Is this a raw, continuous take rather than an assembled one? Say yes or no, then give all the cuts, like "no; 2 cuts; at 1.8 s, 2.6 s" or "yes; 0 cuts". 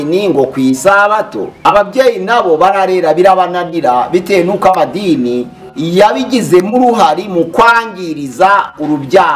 no; 1 cut; at 1.4 s